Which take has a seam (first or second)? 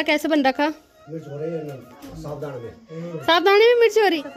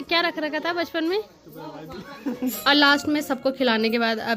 second